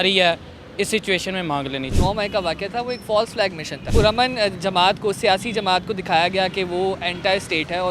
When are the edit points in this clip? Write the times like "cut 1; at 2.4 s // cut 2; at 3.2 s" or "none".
cut 1; at 1.9 s // cut 2; at 3.9 s